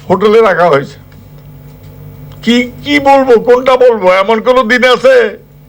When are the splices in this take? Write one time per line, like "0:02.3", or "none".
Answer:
none